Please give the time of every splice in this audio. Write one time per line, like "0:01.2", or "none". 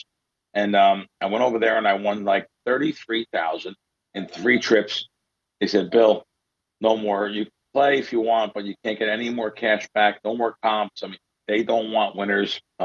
0:02.6
0:11.3